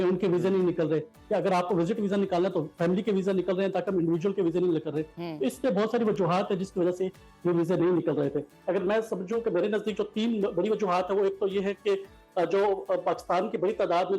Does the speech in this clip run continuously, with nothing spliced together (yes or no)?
yes